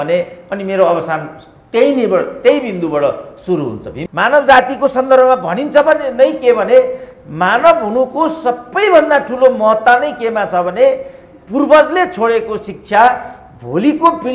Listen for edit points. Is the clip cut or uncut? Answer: cut